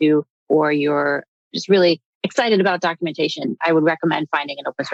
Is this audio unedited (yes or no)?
yes